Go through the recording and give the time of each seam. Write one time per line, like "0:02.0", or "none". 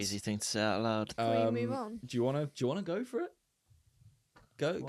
0:01.1